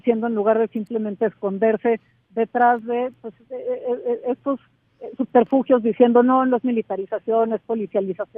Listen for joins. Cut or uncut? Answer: uncut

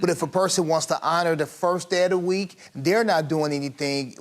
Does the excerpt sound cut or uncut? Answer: cut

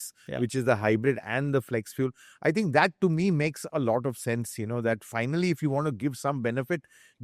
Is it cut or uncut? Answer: uncut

